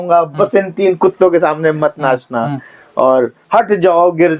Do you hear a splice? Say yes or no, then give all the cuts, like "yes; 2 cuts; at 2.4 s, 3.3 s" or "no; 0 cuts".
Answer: no; 0 cuts